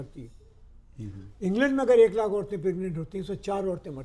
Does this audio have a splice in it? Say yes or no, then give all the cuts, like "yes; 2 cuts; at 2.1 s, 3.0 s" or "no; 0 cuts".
no; 0 cuts